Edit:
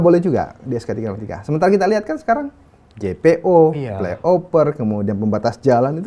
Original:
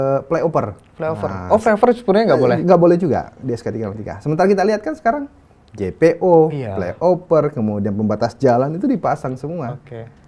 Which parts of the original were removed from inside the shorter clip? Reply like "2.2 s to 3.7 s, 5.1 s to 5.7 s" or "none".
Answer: none